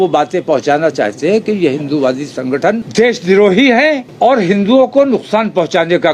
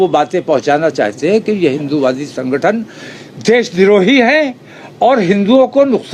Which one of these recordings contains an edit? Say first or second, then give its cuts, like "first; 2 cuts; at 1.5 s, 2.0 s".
first; 2 cuts; at 2.8 s, 4.1 s